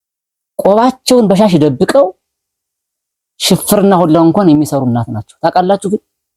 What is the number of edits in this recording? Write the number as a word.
zero